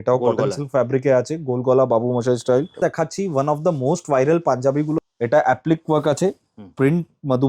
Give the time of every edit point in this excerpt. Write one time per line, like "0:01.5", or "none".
0:02.8
0:05.0